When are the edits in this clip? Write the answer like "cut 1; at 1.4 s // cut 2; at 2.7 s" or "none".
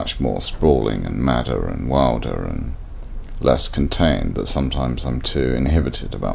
none